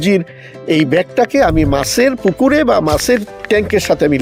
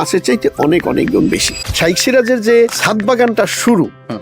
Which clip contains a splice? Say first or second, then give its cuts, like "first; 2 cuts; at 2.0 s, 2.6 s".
second; 2 cuts; at 1.6 s, 2.8 s